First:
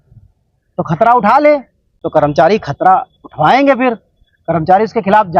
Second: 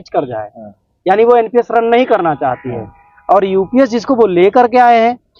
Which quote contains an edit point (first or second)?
first